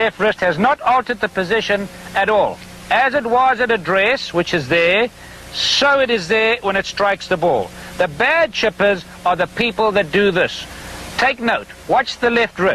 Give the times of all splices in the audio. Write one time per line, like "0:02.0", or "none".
none